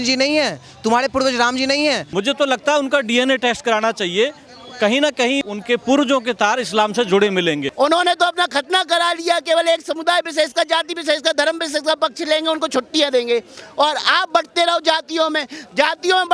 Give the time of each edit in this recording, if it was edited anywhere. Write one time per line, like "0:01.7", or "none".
0:02.0
0:05.5
0:07.7